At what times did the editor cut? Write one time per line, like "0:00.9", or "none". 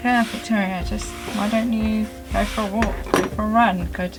none